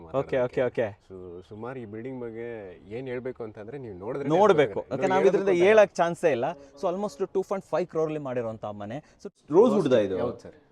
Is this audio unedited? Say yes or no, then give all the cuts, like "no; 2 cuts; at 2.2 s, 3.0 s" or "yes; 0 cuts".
no; 1 cut; at 9.3 s